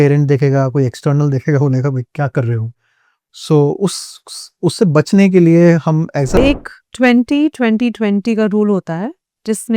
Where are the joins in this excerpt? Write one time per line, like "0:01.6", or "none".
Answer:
0:06.4